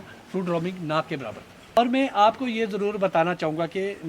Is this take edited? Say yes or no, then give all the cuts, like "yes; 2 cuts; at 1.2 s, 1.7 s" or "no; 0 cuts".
yes; 1 cut; at 1.8 s